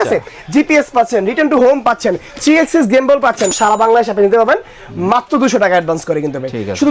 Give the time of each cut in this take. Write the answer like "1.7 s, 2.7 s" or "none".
3.5 s